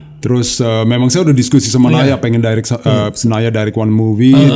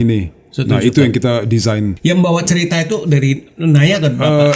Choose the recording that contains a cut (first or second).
second